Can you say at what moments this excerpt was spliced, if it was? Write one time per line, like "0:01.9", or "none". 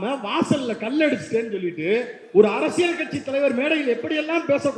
none